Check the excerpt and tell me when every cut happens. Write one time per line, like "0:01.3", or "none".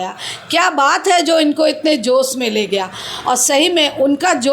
none

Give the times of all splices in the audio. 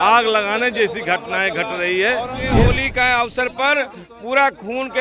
0:02.5

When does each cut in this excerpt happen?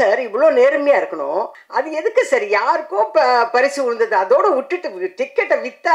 0:01.6

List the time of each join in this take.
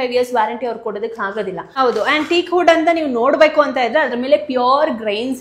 0:01.7

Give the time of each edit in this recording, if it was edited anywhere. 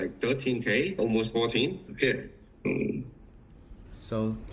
0:02.6

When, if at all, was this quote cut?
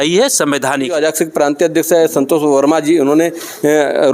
0:01.0

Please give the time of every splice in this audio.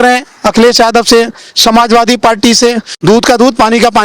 0:03.0

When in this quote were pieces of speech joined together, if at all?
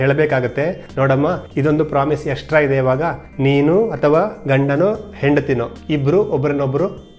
0:01.2
0:03.2
0:05.7

